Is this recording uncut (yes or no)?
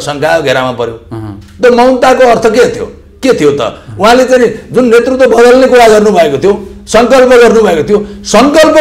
yes